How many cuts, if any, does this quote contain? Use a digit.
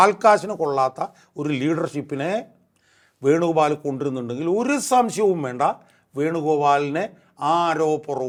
0